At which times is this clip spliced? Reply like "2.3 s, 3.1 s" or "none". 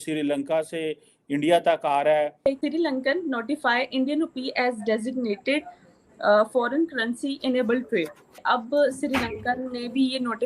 2.5 s, 8.3 s